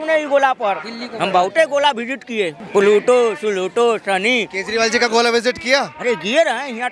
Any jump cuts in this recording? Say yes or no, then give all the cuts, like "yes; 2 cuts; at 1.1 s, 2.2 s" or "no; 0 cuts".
yes; 1 cut; at 2.6 s